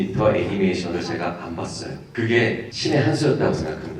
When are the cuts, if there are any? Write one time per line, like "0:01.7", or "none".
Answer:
0:02.0
0:02.7